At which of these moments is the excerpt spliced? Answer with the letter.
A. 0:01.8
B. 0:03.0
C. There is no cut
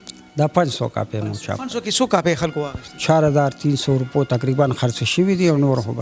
B